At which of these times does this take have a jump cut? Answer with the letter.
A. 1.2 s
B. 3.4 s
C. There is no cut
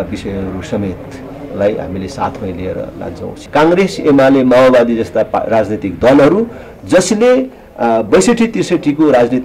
B